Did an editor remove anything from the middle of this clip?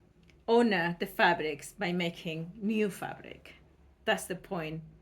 no; 0 cuts

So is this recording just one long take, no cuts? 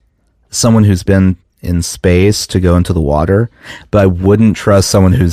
yes; 0 cuts

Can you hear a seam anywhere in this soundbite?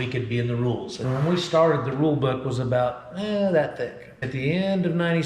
yes; 2 cuts; at 1.0 s, 4.3 s

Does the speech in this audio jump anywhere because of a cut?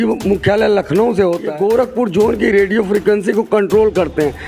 yes; 1 cut; at 1.5 s

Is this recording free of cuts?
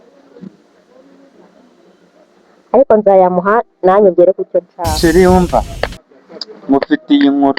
no; 1 cut; at 4.8 s

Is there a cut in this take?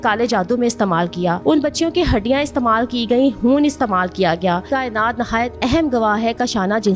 yes; 1 cut; at 4.7 s

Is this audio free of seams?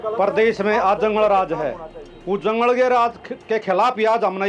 yes; 0 cuts

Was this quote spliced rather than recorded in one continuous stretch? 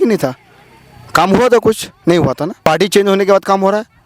yes; 1 cut; at 2.5 s

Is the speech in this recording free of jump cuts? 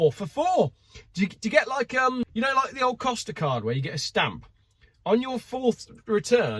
no; 1 cut; at 2.3 s

